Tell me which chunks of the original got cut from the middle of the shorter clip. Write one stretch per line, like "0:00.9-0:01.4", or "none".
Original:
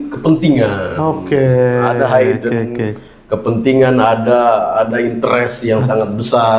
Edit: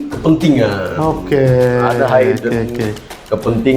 none